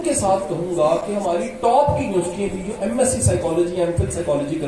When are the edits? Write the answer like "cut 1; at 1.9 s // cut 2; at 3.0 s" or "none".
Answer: none